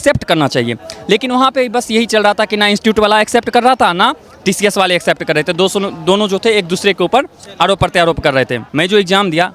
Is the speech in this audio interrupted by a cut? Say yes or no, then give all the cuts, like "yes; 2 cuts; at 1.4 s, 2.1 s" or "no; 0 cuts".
yes; 1 cut; at 8.6 s